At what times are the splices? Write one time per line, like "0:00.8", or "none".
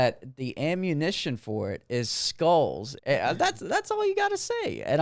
0:02.9